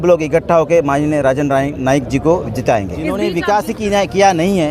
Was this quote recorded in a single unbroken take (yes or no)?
no